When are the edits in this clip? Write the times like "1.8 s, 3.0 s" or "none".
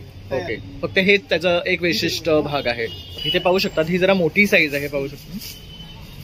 3.0 s